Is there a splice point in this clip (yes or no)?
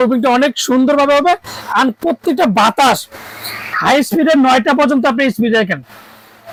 no